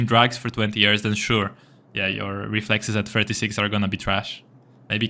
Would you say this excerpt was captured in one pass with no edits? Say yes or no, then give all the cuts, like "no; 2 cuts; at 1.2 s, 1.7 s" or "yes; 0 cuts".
yes; 0 cuts